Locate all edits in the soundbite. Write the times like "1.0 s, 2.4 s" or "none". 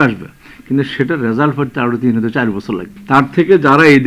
2.9 s